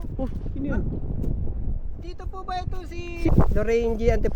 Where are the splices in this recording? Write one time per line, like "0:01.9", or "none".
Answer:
0:03.3